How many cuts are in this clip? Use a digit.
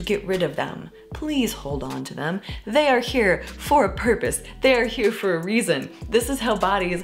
0